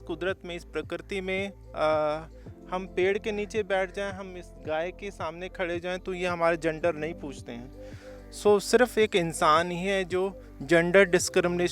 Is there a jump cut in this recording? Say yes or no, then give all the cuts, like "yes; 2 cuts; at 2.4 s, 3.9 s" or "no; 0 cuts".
no; 0 cuts